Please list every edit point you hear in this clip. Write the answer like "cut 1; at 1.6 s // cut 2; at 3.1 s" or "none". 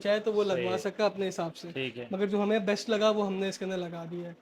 none